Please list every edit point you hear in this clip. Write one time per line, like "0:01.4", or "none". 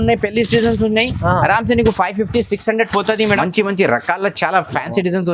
0:03.4